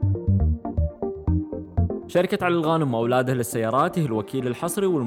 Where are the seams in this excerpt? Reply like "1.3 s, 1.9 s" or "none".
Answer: 2.1 s

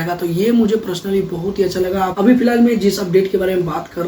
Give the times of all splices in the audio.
2.1 s

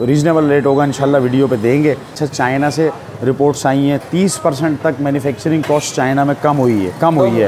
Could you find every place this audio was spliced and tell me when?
2.2 s

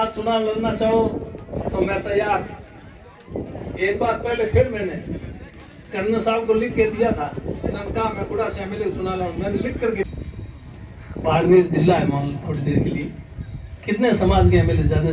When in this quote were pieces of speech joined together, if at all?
10.0 s

